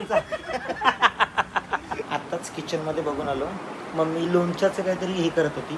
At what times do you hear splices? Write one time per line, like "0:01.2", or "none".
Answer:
0:02.0